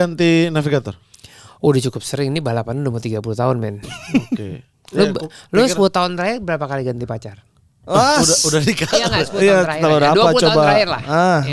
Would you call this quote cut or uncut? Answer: uncut